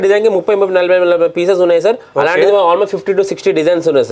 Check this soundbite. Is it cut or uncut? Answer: uncut